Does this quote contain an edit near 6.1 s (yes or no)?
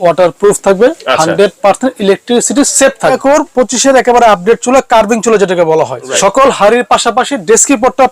yes